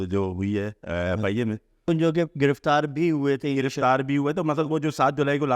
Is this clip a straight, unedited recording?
no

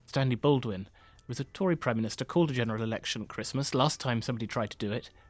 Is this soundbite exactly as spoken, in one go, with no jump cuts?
yes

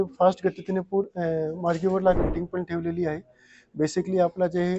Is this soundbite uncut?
no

